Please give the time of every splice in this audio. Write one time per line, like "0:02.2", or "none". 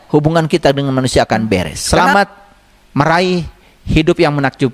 0:01.8